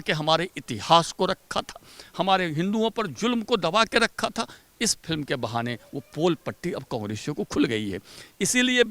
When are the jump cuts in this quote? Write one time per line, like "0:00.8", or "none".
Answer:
none